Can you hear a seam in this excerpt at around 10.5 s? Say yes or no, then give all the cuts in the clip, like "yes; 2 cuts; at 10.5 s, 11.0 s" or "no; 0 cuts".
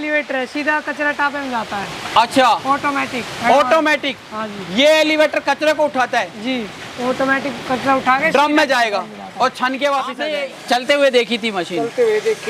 yes; 1 cut; at 10.5 s